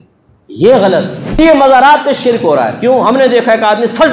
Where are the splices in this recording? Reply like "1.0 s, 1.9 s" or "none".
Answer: 1.2 s